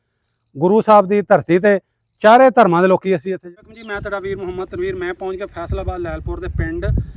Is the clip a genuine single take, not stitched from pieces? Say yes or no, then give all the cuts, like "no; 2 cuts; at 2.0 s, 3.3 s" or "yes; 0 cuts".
no; 1 cut; at 3.3 s